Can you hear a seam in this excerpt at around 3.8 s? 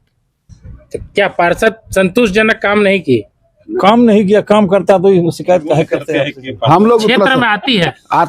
no; 1 cut; at 6.0 s

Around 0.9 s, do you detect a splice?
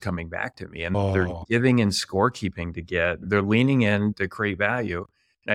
yes; 3 cuts; at 0.9 s, 3.3 s, 4.2 s

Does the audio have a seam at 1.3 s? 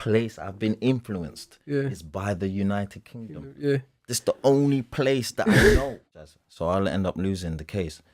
no; 1 cut; at 6.2 s

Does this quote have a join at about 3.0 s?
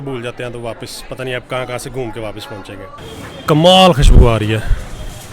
yes; 1 cut; at 3.0 s

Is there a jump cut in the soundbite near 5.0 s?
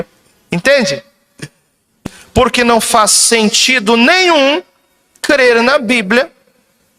no; 1 cut; at 1.9 s

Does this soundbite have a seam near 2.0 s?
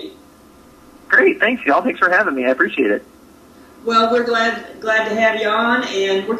yes; 1 cut; at 2.0 s

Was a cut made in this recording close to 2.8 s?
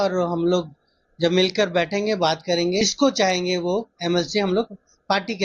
yes; 1 cut; at 2.8 s

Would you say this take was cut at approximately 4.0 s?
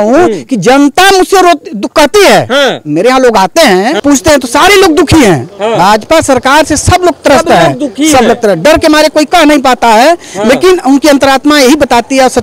yes; 1 cut; at 4.0 s

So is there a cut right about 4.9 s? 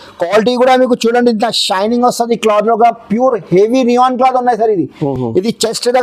no; 0 cuts

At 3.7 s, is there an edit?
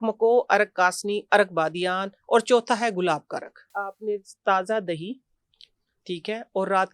yes; 1 cut; at 3.7 s

